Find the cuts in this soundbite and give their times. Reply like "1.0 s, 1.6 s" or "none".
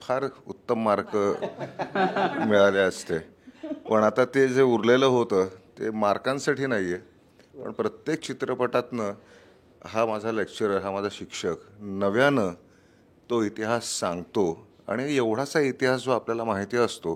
none